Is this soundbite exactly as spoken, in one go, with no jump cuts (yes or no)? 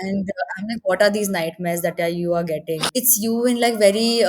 no